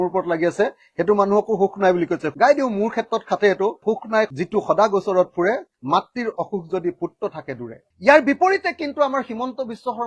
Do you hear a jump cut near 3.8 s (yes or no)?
yes